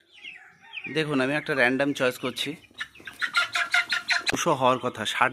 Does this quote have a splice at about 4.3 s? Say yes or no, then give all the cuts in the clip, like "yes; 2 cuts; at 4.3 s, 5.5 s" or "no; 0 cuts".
yes; 1 cut; at 4.3 s